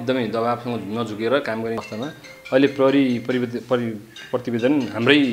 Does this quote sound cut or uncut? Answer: cut